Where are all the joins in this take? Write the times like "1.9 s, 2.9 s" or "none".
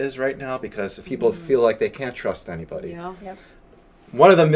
1.0 s, 3.7 s